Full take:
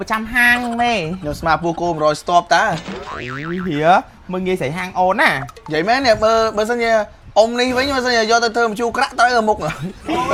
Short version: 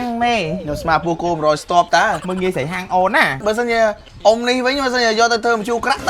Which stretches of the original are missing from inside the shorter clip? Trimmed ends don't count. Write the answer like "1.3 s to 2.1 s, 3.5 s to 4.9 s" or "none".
2.8 s to 4.3 s, 5.5 s to 6.5 s